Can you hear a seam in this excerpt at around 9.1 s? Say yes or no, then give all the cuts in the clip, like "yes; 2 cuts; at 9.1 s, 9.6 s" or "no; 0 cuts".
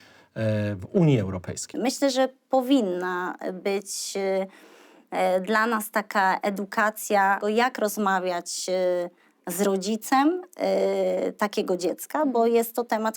no; 2 cuts; at 1.8 s, 7.4 s